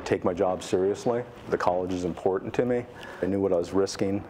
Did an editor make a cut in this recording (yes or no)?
yes